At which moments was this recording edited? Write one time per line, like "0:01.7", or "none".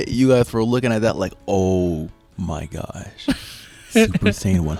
none